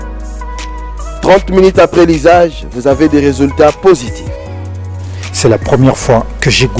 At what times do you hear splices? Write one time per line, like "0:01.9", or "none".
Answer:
0:00.9